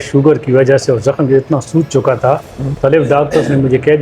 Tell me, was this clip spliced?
yes; 1 cut; at 2.7 s

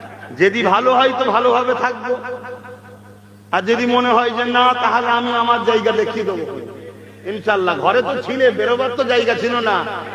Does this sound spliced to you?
no; 0 cuts

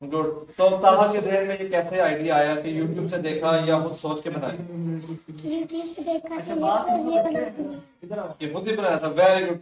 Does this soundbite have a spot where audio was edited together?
no; 0 cuts

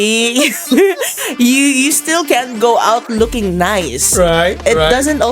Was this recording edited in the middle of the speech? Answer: no; 0 cuts

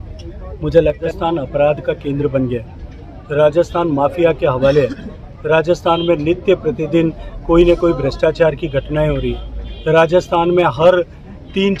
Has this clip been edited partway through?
yes; 1 cut; at 1.0 s

